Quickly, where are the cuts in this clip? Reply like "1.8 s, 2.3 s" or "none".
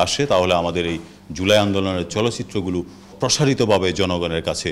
3.1 s